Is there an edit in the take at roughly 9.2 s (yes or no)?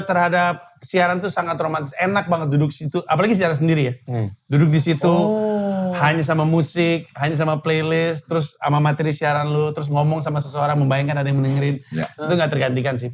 no